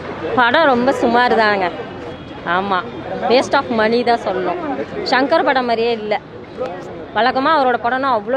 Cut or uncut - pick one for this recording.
uncut